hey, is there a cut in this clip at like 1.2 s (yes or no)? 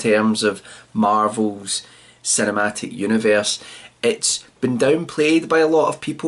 yes